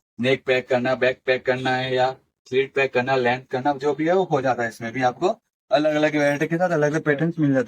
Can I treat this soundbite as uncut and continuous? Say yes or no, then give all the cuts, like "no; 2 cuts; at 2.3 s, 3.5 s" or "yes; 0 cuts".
yes; 0 cuts